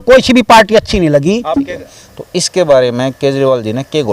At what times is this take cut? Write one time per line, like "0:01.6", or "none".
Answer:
0:01.6